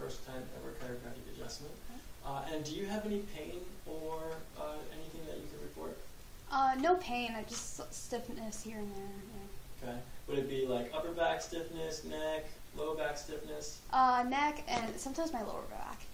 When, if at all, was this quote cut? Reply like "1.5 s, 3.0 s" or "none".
none